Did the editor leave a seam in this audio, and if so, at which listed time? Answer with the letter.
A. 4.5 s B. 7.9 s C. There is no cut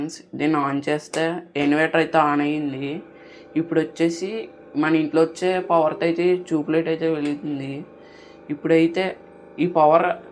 C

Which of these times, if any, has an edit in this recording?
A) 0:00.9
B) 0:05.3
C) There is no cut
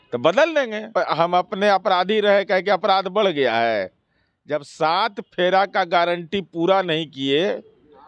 A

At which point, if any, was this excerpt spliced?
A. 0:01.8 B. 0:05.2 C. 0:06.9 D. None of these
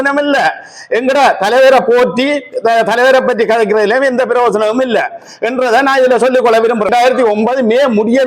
C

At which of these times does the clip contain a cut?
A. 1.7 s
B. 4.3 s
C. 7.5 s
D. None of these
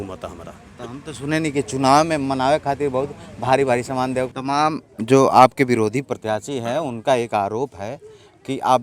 B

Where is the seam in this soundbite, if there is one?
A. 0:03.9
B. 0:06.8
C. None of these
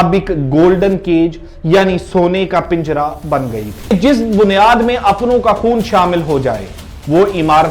A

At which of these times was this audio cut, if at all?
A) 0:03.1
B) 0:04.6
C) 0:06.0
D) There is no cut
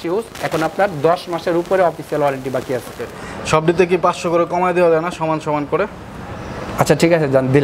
A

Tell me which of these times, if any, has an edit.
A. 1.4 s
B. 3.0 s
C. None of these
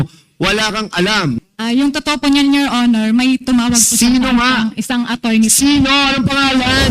A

